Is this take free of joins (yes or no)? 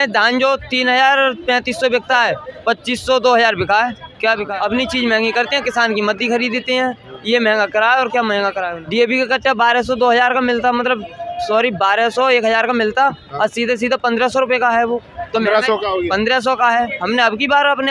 no